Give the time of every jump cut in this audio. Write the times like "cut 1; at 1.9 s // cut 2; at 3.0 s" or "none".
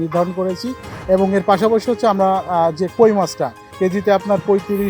cut 1; at 3.6 s